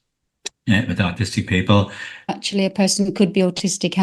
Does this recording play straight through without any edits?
no; 1 cut; at 2.3 s

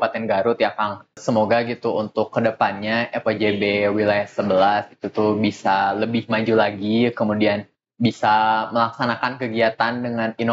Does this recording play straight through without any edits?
no; 1 cut; at 1.2 s

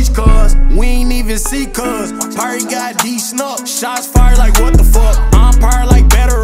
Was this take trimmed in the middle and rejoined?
no; 0 cuts

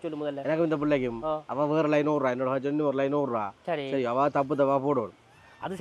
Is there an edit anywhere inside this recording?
no; 0 cuts

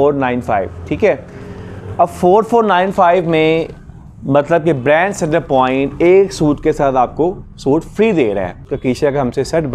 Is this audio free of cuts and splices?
no; 1 cut; at 8.7 s

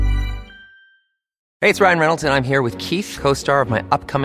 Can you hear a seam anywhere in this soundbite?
yes; 1 cut; at 1.4 s

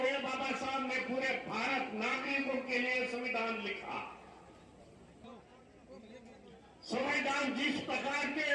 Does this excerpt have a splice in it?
yes; 1 cut; at 5.2 s

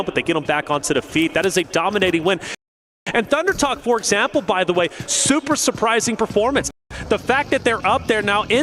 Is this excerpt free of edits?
yes; 0 cuts

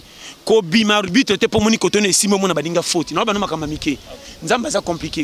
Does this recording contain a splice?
no; 0 cuts

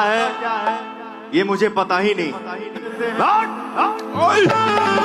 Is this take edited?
yes; 1 cut; at 2.9 s

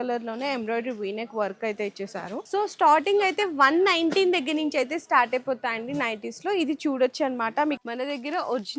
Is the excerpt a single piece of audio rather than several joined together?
no; 2 cuts; at 2.4 s, 7.8 s

